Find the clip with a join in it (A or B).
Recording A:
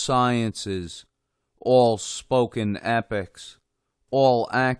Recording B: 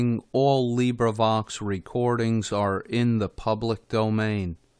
A